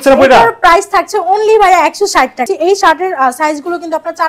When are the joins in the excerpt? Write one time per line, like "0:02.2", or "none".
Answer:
0:02.5

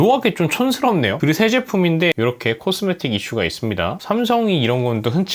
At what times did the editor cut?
0:01.2
0:02.1
0:04.0

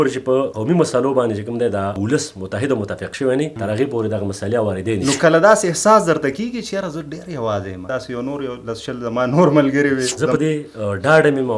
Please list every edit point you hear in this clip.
0:02.0
0:05.0
0:07.8
0:10.2

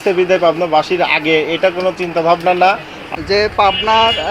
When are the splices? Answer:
0:03.0

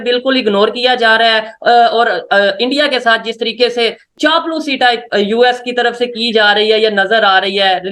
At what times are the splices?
0:04.1

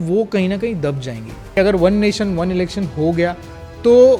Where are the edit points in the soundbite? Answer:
0:01.6

